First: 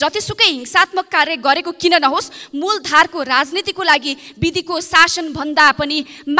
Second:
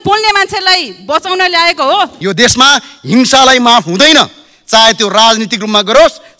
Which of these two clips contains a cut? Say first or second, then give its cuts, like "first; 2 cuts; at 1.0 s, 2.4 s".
second; 1 cut; at 2.2 s